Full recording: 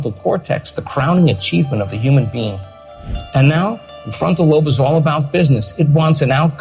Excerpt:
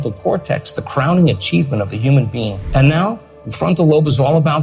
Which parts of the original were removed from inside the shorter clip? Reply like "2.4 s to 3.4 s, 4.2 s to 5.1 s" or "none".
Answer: 2.6 s to 3.2 s

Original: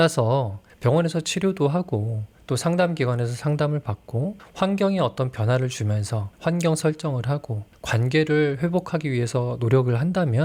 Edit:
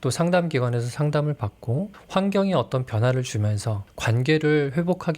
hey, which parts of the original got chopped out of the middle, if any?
6.2 s to 7.6 s

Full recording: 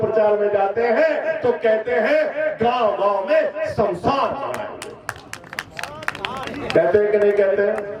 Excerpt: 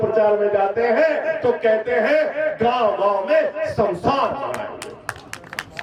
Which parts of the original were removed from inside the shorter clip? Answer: none

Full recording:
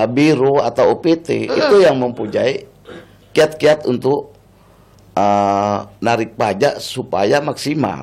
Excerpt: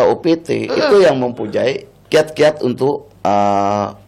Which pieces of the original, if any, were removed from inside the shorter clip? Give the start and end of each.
2.7 s to 3.1 s, 4.3 s to 5.0 s

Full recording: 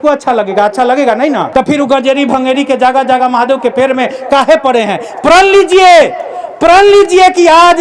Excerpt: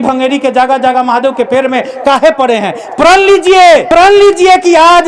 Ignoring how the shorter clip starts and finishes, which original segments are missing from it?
6.1 s to 6.6 s

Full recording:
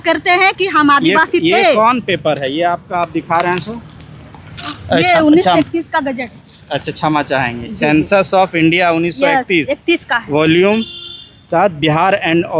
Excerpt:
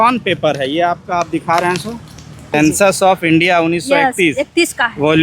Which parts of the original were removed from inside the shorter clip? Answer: 4.4 s to 7.9 s

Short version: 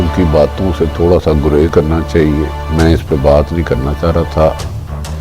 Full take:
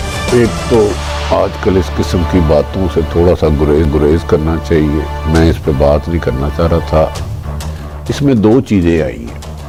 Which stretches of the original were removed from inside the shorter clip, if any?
3.9 s to 4.3 s

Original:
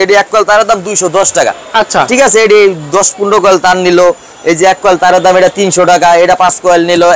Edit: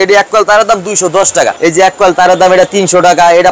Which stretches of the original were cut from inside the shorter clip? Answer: 1.5 s to 4.4 s

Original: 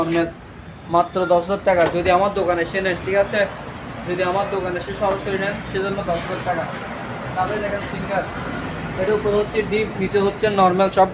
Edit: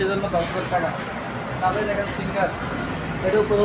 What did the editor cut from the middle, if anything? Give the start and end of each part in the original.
none

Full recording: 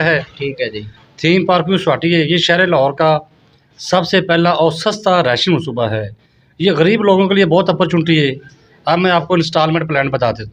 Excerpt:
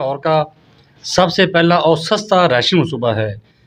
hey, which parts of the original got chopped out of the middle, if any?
none

